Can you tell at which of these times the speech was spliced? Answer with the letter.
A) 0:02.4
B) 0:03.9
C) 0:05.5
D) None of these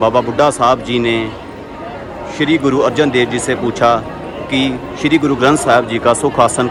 D